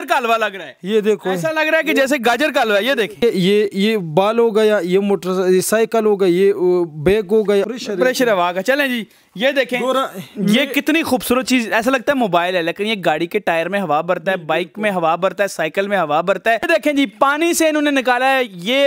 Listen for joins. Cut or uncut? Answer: cut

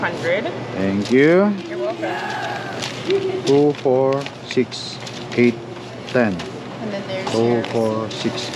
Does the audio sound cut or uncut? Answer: uncut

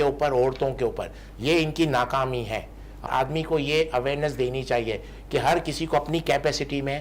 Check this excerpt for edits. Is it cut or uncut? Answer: cut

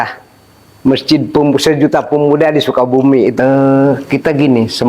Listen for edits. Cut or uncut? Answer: cut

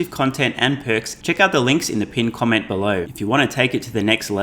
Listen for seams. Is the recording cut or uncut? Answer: cut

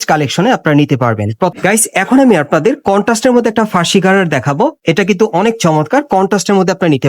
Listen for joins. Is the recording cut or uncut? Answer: cut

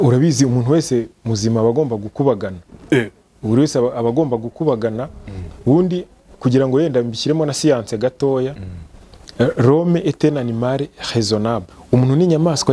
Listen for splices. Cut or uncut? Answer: cut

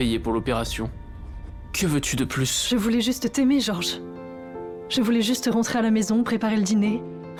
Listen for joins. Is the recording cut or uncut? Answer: uncut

